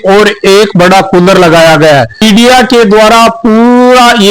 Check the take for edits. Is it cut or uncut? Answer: cut